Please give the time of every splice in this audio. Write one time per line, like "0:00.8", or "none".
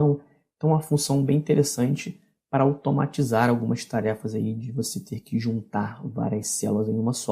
0:06.0